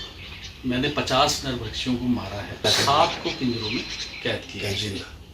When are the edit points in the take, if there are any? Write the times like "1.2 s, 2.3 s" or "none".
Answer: 2.6 s